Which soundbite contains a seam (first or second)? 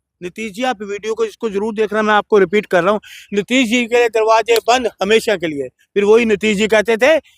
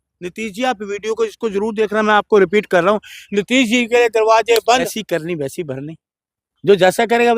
second